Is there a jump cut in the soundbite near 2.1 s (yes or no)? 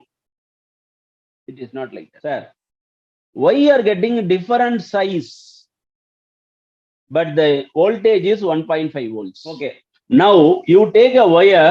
yes